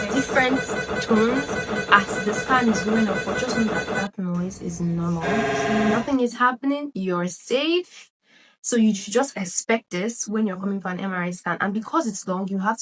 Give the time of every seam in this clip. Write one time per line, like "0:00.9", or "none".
none